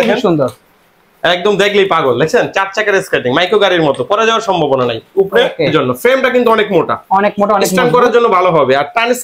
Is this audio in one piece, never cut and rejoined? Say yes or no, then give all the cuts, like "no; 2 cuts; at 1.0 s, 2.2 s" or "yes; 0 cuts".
no; 1 cut; at 5.7 s